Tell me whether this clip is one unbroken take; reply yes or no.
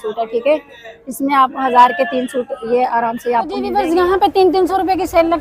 no